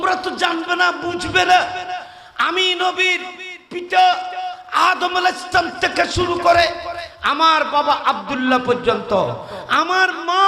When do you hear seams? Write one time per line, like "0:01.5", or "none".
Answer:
none